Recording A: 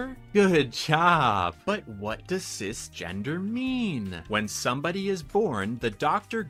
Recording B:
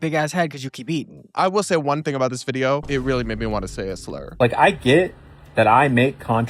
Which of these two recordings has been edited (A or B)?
B